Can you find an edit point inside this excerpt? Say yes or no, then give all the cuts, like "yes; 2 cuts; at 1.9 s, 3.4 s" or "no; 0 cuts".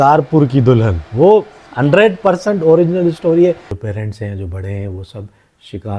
yes; 1 cut; at 3.7 s